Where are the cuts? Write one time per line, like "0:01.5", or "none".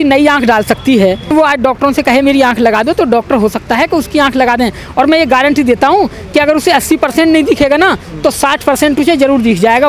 0:01.3